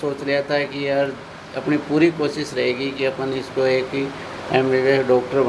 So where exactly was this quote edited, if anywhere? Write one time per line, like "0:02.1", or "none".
none